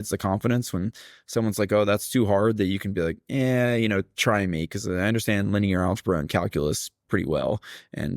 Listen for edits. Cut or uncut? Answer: cut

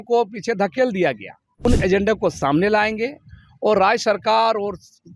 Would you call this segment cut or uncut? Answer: cut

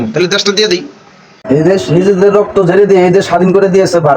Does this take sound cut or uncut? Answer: cut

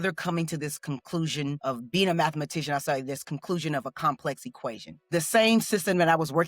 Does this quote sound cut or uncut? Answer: cut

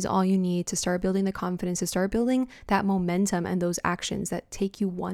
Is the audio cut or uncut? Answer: uncut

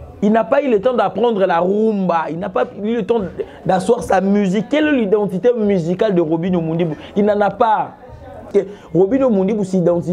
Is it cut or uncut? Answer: cut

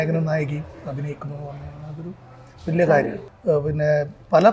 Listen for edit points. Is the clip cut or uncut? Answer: cut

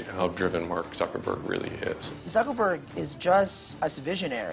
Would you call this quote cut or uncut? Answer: cut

